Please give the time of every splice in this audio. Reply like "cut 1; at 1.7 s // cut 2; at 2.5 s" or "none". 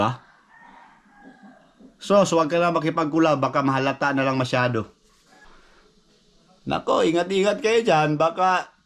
cut 1; at 5.4 s